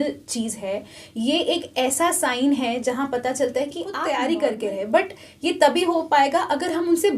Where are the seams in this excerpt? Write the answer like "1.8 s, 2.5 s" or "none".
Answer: 4.0 s